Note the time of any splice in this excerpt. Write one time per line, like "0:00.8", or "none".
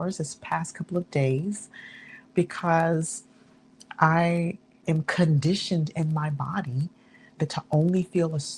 0:04.8
0:07.2